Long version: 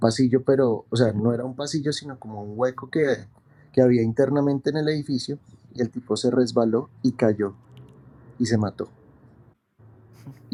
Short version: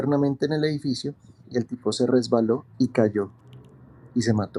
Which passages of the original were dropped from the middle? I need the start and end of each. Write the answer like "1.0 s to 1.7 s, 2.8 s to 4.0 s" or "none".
none

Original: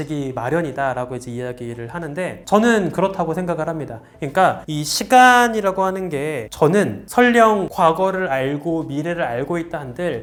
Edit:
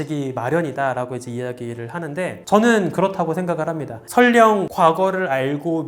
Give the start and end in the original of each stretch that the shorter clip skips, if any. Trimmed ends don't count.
4.0 s to 7.0 s

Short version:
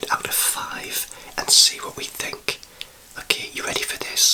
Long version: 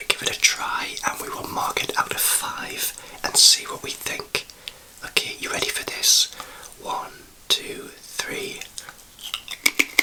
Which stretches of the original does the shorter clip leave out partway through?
none

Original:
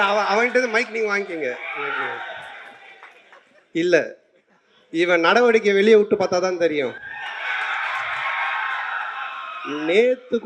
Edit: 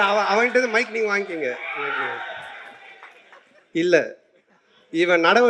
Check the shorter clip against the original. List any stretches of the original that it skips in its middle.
none

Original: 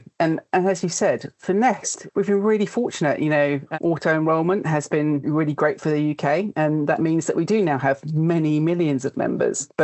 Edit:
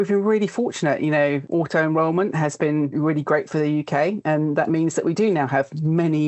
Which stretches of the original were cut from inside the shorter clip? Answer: 3.6 s to 3.8 s

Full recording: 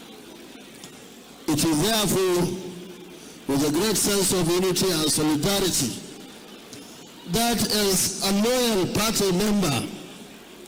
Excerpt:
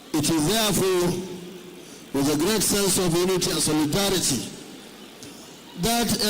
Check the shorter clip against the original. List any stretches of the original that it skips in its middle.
4.9 s to 5.0 s

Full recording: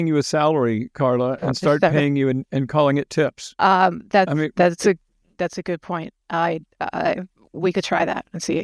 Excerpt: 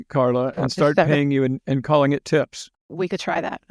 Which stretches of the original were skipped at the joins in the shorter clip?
3.5 s to 7.3 s

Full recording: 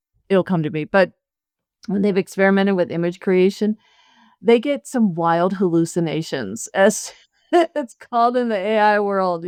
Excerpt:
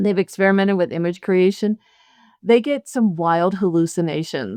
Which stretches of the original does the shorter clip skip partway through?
none

